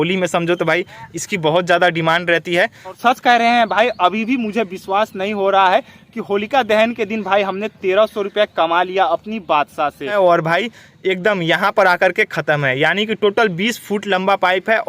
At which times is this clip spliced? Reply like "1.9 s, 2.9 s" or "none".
3.0 s, 10.1 s